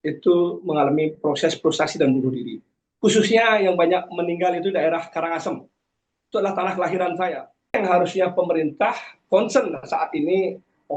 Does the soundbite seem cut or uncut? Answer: cut